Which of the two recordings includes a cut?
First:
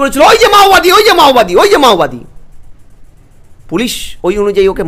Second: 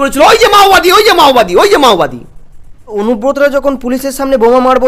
second; 1 cut; at 3.0 s

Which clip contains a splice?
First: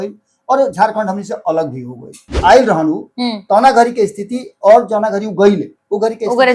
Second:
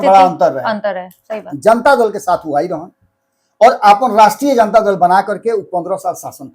first; 1 cut; at 2.4 s

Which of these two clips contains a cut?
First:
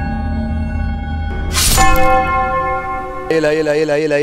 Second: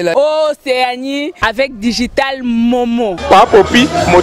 first; 1 cut; at 1.5 s

